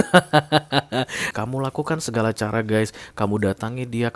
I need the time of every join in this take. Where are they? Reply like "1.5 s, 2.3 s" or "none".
1.3 s